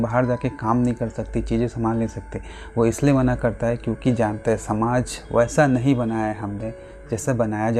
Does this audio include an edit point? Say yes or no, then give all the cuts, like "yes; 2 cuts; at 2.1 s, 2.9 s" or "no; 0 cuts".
no; 0 cuts